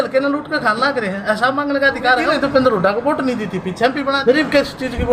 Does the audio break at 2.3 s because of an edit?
yes; 2 cuts; at 2.3 s, 4.2 s

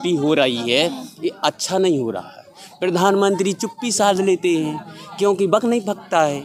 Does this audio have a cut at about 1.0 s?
no; 0 cuts

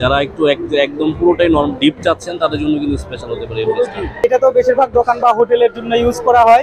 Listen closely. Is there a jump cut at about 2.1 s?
no; 1 cut; at 4.2 s

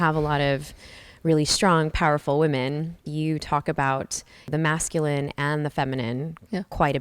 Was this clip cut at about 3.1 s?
yes; 2 cuts; at 3.1 s, 4.5 s

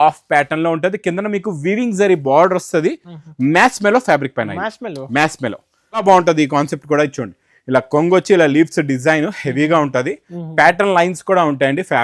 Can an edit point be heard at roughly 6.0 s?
yes; 1 cut; at 6.0 s

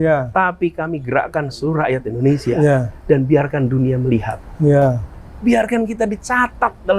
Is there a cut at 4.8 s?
no; 0 cuts

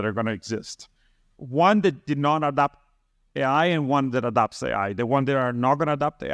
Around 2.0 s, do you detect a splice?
no; 0 cuts

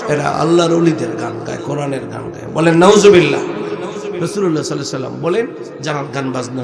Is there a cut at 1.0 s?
no; 1 cut; at 4.2 s

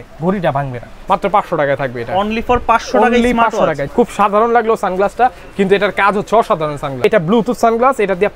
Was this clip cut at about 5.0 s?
no; 3 cuts; at 0.9 s, 3.8 s, 7.0 s

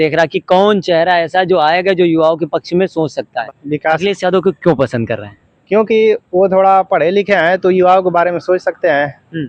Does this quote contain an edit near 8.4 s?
no; 1 cut; at 3.4 s

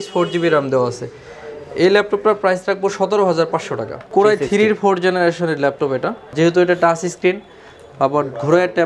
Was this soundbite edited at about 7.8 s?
no; 2 cuts; at 4.0 s, 6.3 s

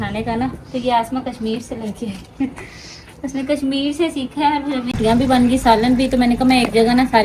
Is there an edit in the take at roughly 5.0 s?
yes; 1 cut; at 5.0 s

